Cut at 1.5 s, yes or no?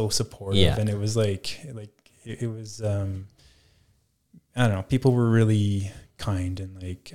no